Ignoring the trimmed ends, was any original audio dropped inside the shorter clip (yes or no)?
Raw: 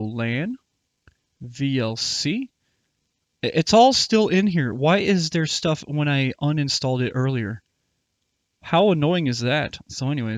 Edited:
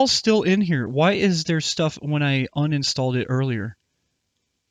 no